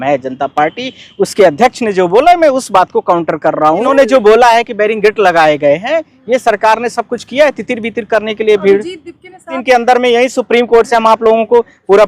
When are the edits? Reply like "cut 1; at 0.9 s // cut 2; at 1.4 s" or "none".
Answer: cut 1; at 3.9 s // cut 2; at 9.6 s